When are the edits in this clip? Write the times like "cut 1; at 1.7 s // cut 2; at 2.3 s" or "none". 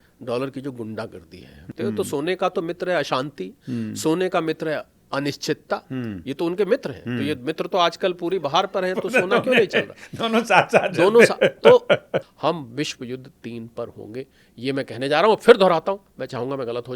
cut 1; at 1.6 s // cut 2; at 12.1 s